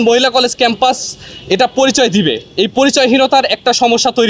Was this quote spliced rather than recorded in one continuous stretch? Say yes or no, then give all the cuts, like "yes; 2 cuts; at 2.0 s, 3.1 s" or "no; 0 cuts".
no; 0 cuts